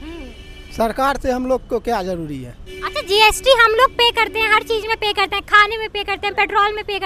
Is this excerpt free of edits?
yes; 0 cuts

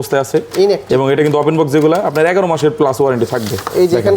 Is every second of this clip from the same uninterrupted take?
yes; 0 cuts

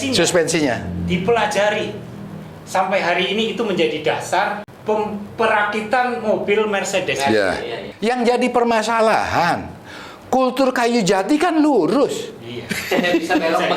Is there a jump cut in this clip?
yes; 2 cuts; at 4.7 s, 7.8 s

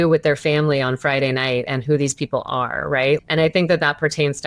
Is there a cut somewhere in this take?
yes; 1 cut; at 3.2 s

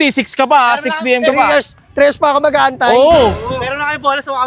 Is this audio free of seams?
yes; 0 cuts

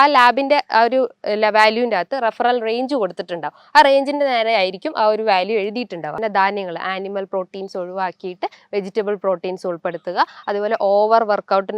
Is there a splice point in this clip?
yes; 1 cut; at 6.1 s

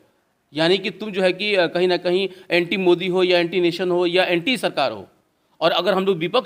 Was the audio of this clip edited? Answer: no; 0 cuts

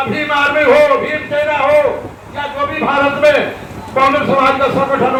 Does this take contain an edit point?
no; 0 cuts

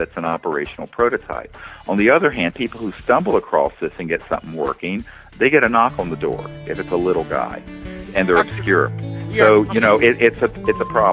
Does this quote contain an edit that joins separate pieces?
no; 0 cuts

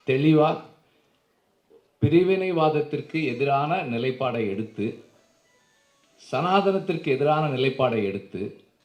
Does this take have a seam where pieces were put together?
no; 0 cuts

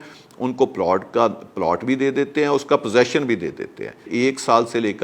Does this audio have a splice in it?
yes; 1 cut; at 4.1 s

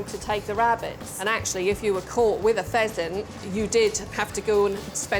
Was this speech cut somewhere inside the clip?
yes; 1 cut; at 1.1 s

